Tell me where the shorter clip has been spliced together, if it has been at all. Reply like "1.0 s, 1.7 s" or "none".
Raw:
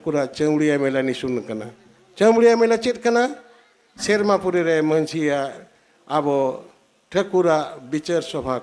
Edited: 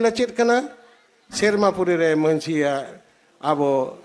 none